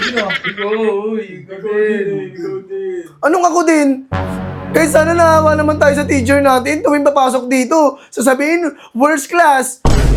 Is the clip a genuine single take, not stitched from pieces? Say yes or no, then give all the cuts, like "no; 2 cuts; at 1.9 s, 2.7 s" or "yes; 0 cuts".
yes; 0 cuts